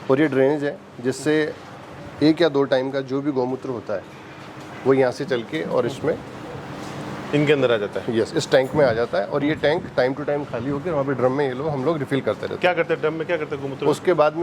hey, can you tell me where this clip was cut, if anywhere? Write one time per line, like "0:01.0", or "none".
none

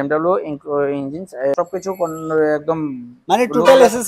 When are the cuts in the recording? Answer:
0:01.5

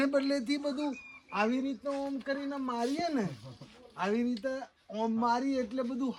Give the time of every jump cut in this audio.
none

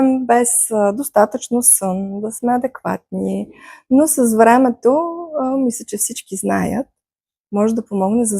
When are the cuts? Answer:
0:07.4

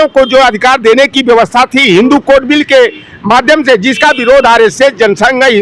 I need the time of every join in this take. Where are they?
none

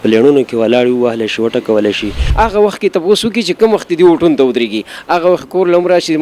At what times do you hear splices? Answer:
0:02.2

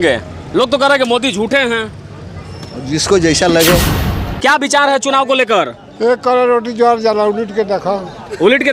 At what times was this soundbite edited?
0:04.0

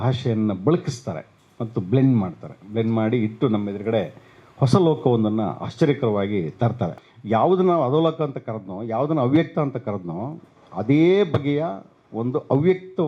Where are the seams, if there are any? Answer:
0:06.9

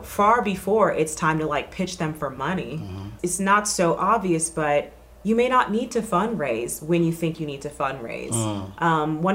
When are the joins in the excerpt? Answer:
0:03.1

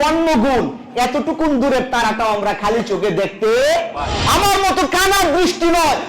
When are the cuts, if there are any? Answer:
0:04.2

